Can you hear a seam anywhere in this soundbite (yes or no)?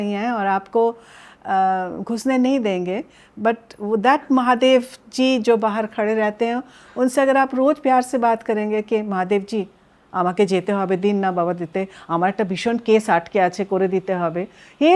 no